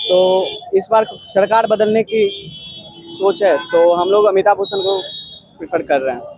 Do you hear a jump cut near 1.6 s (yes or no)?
no